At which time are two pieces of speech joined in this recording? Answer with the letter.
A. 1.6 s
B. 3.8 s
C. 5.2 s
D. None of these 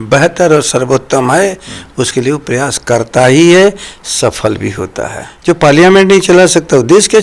C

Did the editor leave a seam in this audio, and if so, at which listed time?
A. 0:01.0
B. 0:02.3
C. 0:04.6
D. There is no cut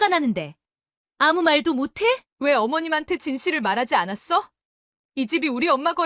B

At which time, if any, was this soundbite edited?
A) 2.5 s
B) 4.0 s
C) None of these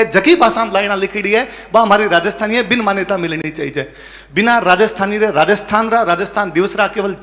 C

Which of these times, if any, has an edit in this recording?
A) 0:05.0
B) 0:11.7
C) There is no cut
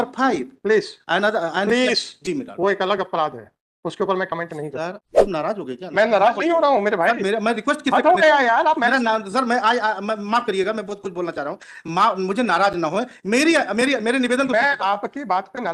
A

